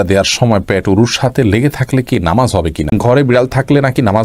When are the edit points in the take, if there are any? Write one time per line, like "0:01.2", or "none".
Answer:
0:02.9